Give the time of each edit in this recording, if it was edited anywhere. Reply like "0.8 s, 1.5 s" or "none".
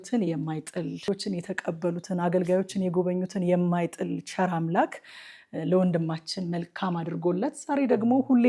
1.0 s